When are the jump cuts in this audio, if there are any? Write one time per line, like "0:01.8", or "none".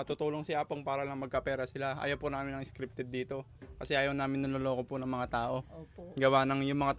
none